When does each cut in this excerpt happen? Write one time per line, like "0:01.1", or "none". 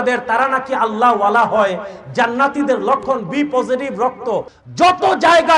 0:04.6

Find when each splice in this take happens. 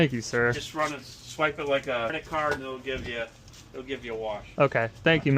0:02.2

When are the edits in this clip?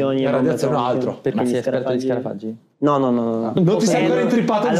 0:01.3
0:03.6

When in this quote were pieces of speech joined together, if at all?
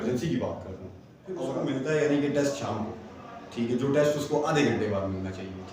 0:01.5

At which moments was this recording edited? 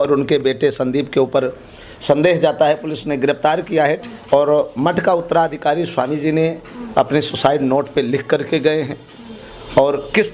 0:04.1

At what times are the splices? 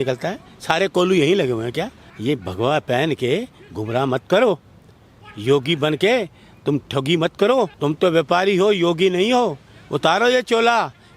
0:02.0
0:07.7

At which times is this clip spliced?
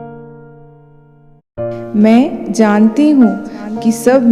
0:01.9

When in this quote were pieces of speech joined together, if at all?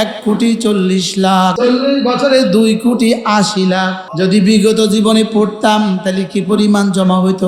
0:01.6
0:04.0

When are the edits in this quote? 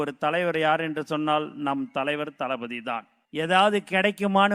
0:03.1

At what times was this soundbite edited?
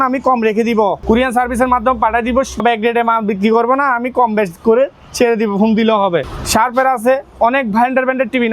0:01.0
0:02.6
0:06.4

